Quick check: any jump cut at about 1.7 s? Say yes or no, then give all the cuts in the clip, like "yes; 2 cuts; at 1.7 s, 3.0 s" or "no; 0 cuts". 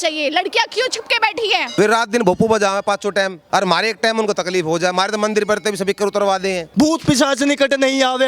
yes; 2 cuts; at 1.7 s, 6.6 s